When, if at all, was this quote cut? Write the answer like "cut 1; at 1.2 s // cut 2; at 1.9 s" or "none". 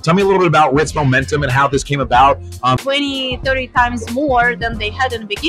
cut 1; at 2.8 s

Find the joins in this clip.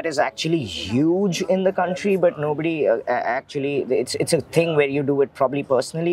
none

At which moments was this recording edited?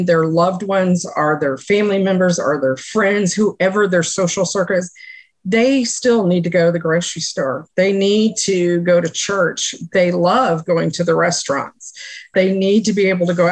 none

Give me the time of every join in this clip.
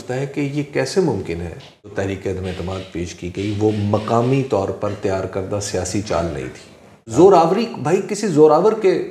cut 1; at 1.9 s // cut 2; at 7.1 s

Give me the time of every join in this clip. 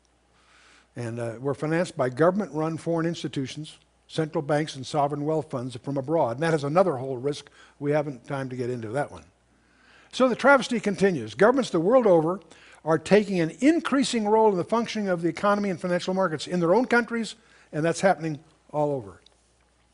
cut 1; at 6.4 s

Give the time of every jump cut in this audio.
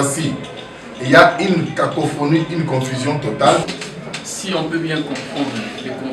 cut 1; at 3.6 s

